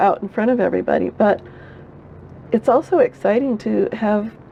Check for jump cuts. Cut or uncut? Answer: uncut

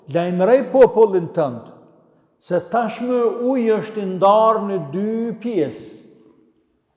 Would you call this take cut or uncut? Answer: uncut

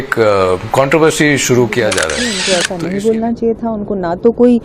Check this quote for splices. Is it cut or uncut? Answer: cut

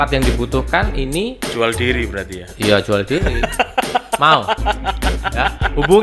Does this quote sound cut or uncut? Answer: uncut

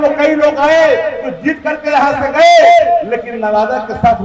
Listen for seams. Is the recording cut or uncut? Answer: uncut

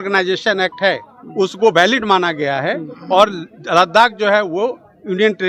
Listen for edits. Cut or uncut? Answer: uncut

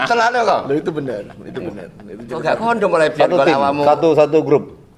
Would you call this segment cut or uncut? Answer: uncut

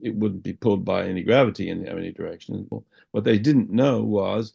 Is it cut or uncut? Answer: cut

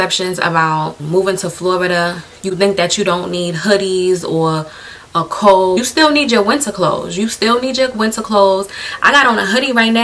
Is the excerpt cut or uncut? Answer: cut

